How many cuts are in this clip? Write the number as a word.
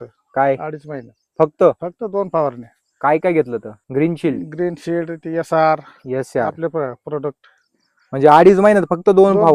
zero